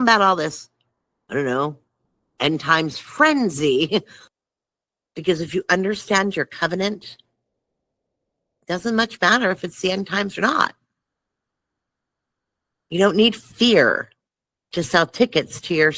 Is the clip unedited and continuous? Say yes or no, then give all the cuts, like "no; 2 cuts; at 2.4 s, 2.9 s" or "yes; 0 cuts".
no; 1 cut; at 4.2 s